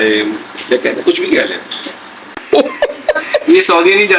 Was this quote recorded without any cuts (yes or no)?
no